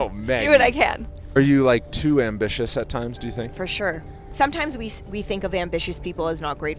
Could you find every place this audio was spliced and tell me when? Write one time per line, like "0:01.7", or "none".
0:01.4
0:04.3

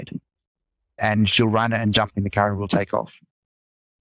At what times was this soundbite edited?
0:01.0

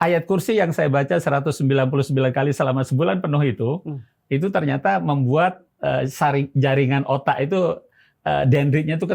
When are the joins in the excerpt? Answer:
none

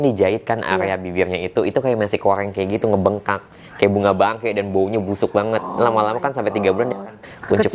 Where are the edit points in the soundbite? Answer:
none

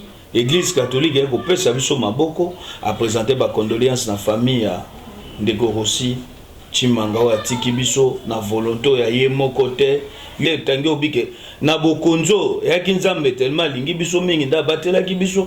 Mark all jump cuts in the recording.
0:02.7
0:10.4

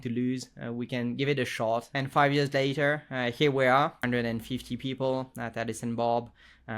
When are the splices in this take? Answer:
0:01.9
0:04.0

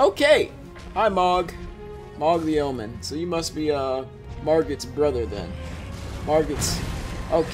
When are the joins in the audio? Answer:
none

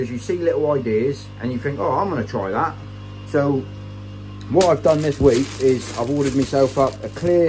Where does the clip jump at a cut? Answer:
none

